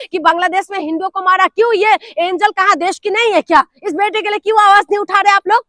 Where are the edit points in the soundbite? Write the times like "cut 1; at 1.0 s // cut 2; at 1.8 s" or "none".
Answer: none